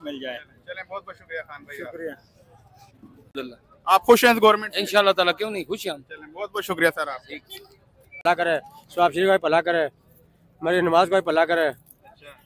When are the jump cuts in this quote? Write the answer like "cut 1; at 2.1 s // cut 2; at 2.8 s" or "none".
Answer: cut 1; at 3.3 s // cut 2; at 7.8 s